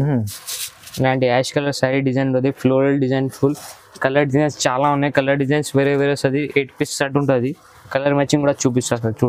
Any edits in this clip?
no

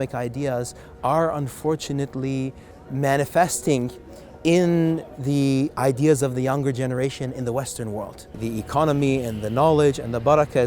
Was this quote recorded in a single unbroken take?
no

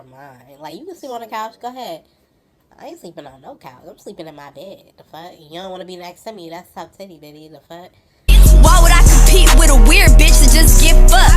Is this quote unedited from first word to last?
no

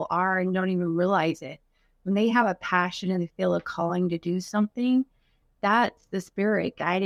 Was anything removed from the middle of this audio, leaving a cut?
no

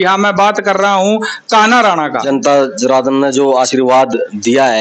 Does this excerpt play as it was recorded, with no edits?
no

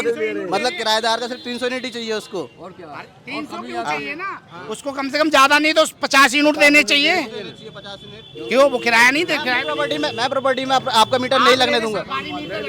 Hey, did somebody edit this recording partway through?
no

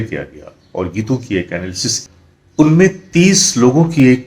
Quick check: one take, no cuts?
no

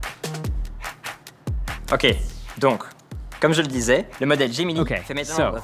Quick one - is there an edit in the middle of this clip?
no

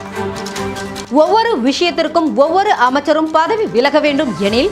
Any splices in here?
yes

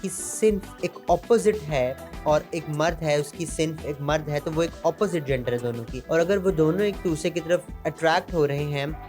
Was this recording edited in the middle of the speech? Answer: yes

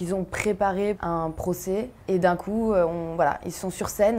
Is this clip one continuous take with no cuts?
no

